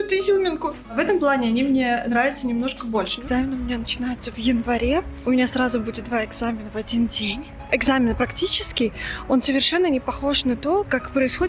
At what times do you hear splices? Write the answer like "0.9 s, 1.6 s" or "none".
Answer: 1.0 s, 3.1 s, 5.1 s, 7.6 s